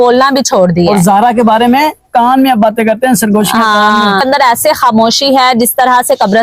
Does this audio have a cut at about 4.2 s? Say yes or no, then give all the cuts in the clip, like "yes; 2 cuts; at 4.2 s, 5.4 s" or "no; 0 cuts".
yes; 1 cut; at 4.2 s